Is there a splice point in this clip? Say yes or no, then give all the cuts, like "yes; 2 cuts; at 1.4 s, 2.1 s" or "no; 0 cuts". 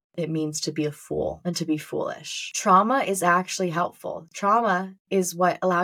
yes; 1 cut; at 2.6 s